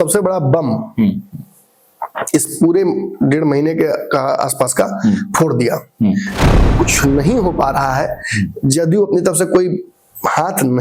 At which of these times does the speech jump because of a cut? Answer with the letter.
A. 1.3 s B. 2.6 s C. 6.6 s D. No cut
C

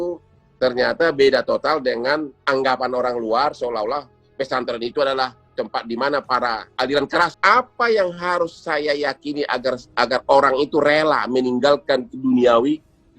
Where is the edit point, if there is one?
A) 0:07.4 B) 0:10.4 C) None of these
A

